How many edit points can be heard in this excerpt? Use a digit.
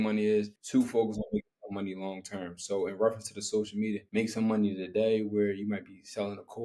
0